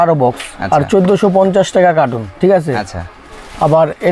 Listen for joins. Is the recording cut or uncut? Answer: uncut